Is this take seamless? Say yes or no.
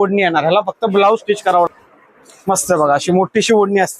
no